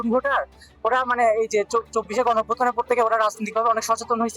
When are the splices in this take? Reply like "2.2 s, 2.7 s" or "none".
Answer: none